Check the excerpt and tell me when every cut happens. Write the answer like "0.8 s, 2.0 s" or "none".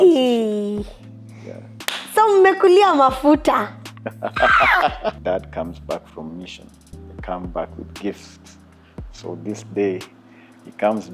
5.2 s